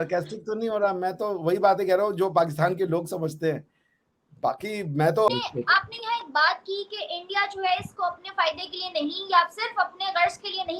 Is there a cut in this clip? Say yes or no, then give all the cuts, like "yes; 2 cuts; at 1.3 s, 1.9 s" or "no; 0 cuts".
yes; 1 cut; at 5.3 s